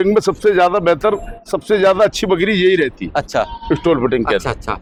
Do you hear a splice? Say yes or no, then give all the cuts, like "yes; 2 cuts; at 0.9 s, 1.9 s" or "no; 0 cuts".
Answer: no; 0 cuts